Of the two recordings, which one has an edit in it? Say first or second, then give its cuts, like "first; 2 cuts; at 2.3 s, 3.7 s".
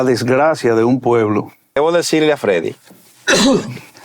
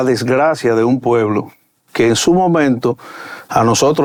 first; 1 cut; at 1.7 s